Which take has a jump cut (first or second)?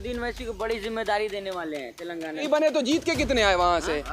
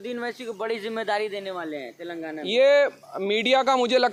first